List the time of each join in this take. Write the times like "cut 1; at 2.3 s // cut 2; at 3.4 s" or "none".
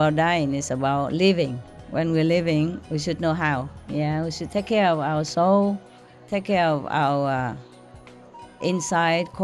cut 1; at 2.8 s